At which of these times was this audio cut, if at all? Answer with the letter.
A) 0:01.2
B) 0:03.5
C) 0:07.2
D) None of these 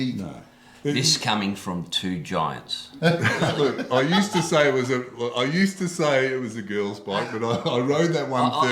B